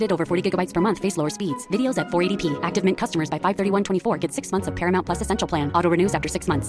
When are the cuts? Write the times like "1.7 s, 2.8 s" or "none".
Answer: none